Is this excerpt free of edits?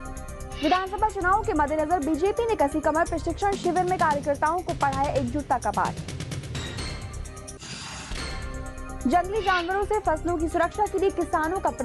yes; 0 cuts

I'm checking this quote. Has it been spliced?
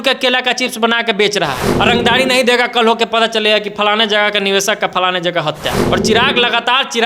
yes; 2 cuts; at 1.7 s, 5.8 s

